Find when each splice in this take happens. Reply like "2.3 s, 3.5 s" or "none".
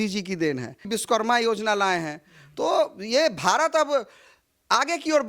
0.9 s